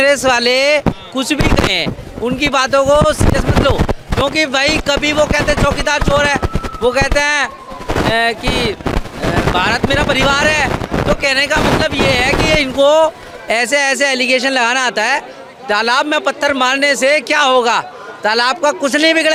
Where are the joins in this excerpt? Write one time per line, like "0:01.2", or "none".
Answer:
none